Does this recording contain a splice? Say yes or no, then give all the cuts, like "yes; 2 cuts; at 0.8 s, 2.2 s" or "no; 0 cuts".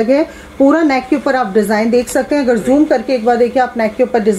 no; 0 cuts